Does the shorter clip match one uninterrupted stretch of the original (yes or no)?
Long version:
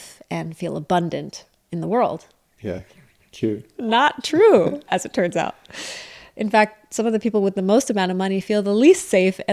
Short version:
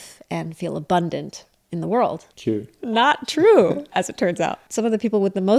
no